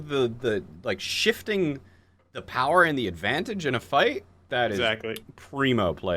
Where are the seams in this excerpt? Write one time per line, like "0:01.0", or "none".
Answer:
0:04.5